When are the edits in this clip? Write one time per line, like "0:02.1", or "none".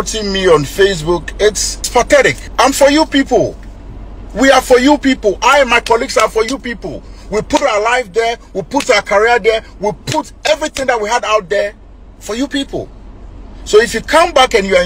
0:01.9
0:02.4